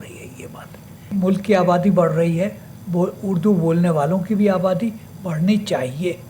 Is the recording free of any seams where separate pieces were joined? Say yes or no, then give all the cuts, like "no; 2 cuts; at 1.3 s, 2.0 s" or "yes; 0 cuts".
no; 1 cut; at 1.1 s